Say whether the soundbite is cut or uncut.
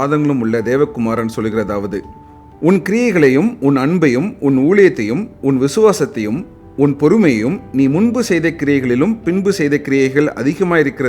cut